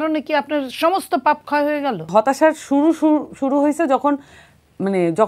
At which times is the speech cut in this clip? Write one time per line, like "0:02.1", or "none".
0:02.1